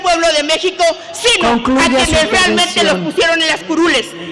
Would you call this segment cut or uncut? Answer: uncut